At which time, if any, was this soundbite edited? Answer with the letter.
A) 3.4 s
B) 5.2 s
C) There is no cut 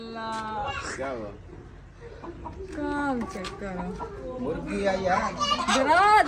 A